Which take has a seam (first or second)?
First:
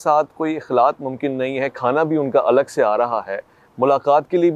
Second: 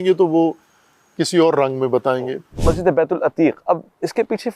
second